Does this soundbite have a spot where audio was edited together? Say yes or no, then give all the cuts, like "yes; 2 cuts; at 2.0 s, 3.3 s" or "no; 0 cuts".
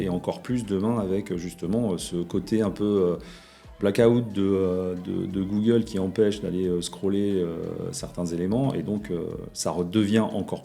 no; 0 cuts